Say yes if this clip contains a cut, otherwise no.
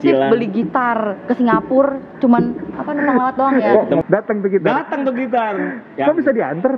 yes